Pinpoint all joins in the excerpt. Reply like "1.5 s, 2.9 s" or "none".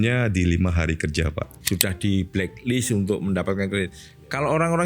1.5 s